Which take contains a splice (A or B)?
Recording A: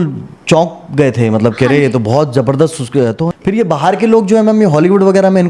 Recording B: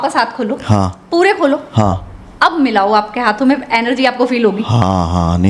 A